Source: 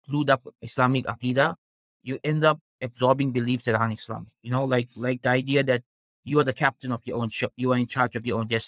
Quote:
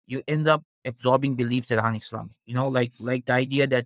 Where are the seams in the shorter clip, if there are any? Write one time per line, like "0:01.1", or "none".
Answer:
none